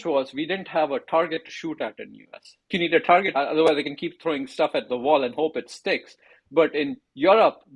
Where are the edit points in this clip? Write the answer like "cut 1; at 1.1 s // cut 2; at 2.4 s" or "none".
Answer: cut 1; at 2.7 s // cut 2; at 3.3 s

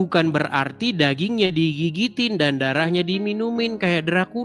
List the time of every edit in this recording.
none

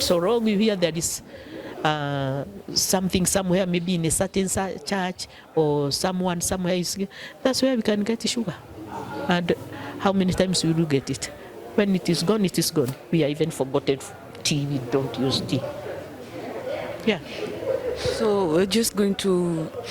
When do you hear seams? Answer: none

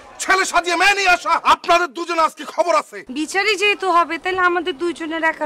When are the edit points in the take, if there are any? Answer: cut 1; at 1.4 s // cut 2; at 3.0 s

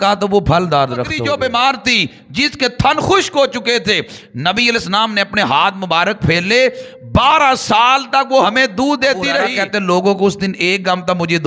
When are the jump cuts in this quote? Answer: cut 1; at 1.2 s // cut 2; at 9.5 s

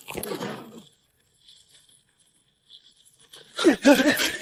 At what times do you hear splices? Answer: none

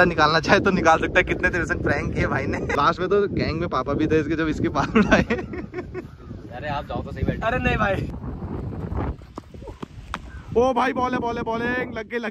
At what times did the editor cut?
cut 1; at 2.7 s // cut 2; at 8.1 s

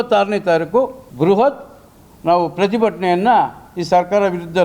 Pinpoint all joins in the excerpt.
cut 1; at 1.0 s

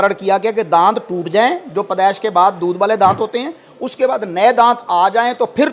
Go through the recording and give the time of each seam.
none

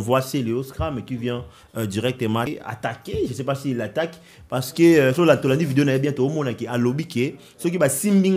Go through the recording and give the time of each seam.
cut 1; at 2.5 s

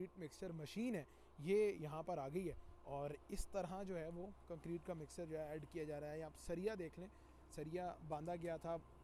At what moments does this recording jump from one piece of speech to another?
none

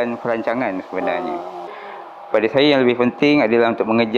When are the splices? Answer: cut 1; at 1.9 s

